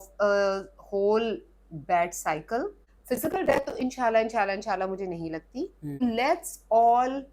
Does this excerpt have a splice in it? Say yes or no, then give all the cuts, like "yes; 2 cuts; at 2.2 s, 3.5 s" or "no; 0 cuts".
yes; 2 cuts; at 2.9 s, 6.0 s